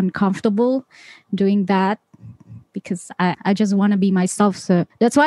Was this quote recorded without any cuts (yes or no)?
yes